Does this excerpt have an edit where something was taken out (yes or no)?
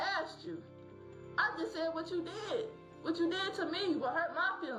no